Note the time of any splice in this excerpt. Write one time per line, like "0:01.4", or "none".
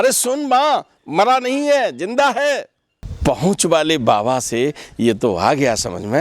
0:03.0